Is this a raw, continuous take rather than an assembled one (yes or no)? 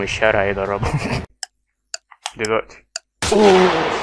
no